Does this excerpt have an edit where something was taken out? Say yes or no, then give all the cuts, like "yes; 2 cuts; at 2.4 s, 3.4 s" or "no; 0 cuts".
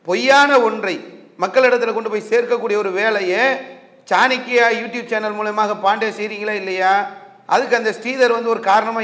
no; 0 cuts